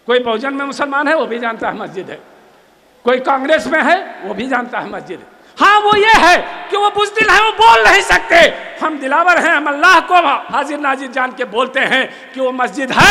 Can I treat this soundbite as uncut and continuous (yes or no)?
yes